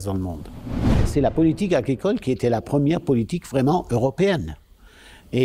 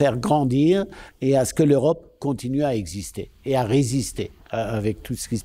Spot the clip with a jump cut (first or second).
first